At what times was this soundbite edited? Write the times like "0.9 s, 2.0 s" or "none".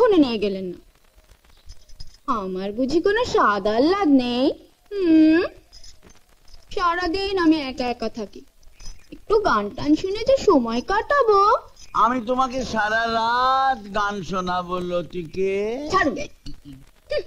none